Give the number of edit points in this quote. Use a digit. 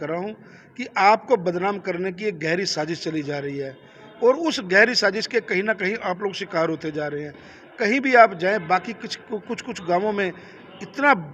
0